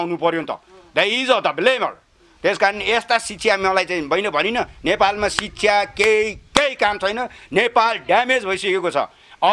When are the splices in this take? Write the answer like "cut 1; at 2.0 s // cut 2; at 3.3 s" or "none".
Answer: none